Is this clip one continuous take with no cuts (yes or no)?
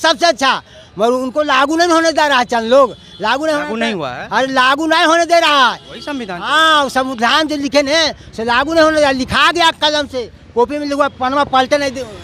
yes